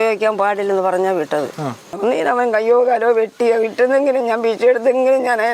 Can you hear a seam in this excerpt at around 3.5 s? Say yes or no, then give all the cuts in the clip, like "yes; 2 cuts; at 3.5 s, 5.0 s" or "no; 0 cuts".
no; 1 cut; at 1.9 s